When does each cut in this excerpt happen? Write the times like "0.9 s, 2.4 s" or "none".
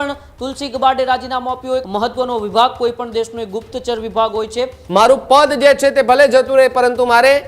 1.8 s, 4.7 s